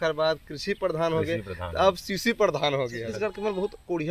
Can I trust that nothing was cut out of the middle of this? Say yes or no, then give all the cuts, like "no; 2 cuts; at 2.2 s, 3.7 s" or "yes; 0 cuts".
no; 1 cut; at 3.0 s